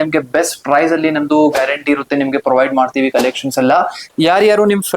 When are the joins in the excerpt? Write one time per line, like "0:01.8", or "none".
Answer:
0:04.0